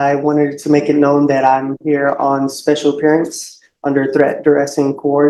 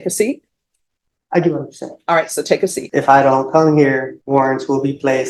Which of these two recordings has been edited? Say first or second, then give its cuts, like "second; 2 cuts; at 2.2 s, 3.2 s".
second; 2 cuts; at 2.8 s, 4.1 s